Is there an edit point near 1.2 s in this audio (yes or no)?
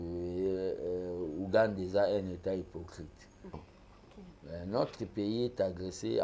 no